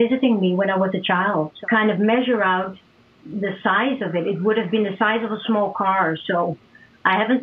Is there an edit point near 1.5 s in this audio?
yes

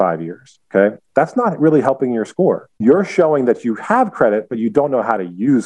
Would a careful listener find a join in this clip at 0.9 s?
no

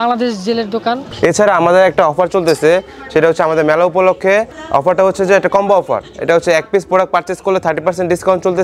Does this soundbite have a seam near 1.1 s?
yes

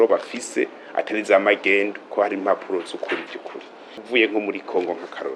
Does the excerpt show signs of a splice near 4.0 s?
yes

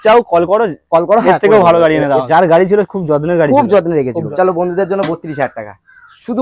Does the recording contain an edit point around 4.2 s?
yes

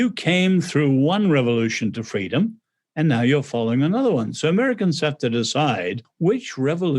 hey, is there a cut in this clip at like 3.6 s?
no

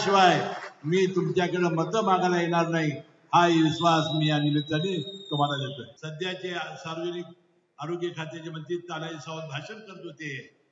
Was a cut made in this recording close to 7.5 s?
no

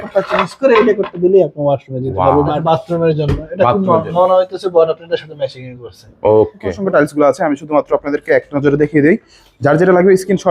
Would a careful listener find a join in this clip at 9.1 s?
no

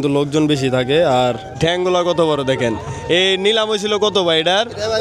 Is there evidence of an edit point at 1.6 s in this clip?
yes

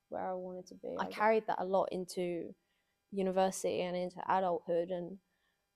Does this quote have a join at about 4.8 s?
no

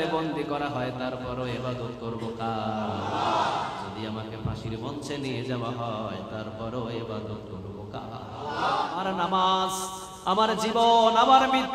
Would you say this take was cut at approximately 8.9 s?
yes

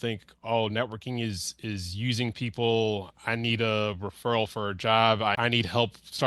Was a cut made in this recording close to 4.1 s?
no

